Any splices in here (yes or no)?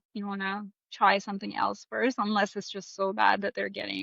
no